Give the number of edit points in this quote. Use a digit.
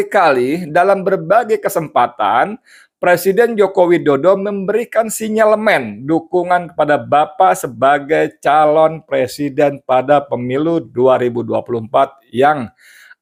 0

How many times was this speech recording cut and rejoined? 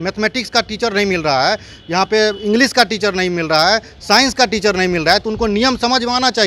0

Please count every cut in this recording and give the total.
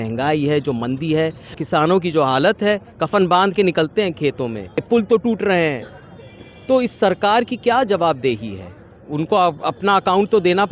2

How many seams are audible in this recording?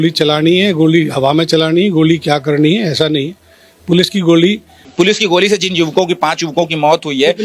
1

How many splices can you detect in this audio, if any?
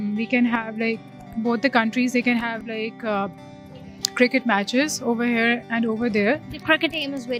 0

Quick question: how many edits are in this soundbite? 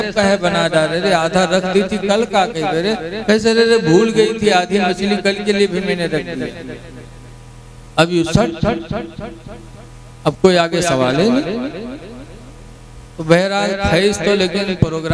0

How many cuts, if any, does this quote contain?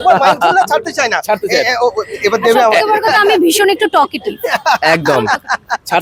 0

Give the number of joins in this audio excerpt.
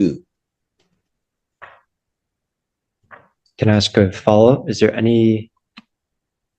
0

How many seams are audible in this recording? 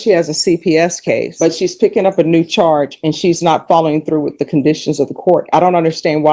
0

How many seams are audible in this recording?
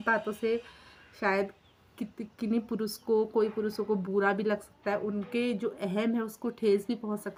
0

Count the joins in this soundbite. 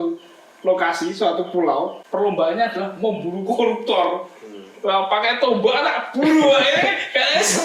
1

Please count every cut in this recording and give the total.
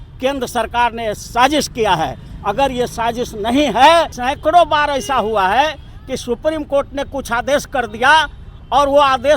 1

